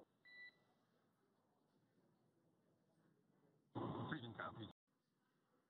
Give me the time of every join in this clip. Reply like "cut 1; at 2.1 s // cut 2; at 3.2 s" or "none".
cut 1; at 4.7 s